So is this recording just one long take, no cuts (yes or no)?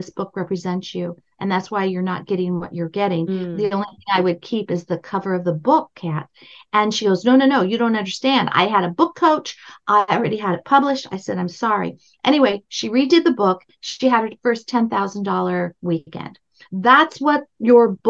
yes